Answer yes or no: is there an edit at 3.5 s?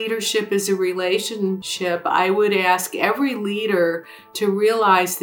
no